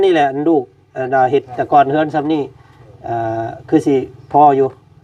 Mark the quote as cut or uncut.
uncut